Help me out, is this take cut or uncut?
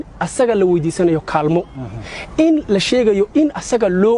uncut